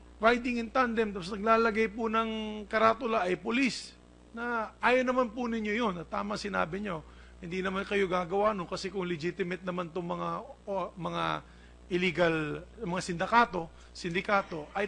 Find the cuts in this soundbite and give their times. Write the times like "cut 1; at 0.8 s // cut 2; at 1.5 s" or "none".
cut 1; at 1.3 s